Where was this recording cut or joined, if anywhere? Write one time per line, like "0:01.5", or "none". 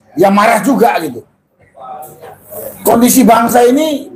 none